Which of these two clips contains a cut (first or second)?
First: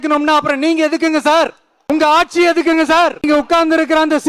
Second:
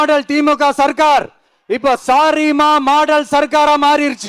first